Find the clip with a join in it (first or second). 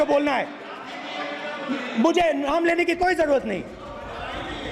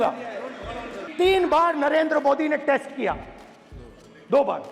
second